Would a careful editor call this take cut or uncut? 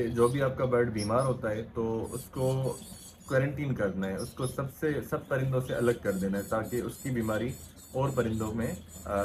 uncut